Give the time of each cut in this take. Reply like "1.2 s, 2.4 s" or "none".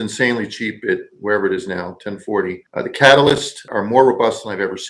2.6 s, 3.7 s